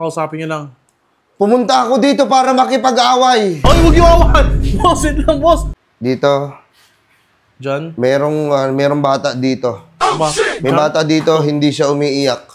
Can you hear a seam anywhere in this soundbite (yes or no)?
yes